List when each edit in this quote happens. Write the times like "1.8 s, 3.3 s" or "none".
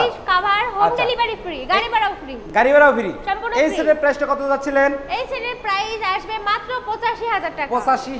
none